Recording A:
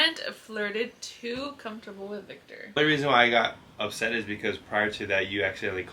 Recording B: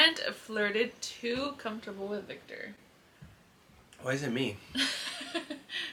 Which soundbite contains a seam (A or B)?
A